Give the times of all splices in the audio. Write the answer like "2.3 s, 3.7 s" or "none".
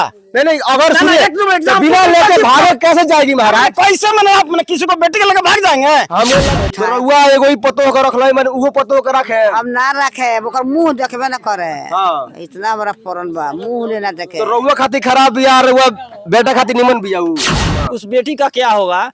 6.5 s, 17.8 s